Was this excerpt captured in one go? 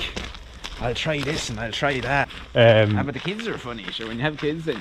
no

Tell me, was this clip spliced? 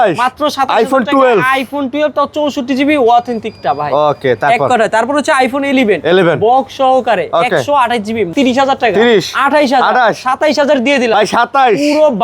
no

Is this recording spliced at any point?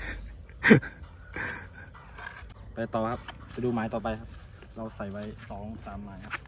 yes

